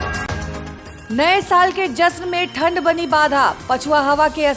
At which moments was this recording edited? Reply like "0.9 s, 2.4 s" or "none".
0.9 s